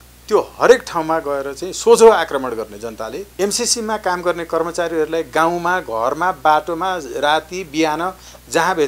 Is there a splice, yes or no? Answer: yes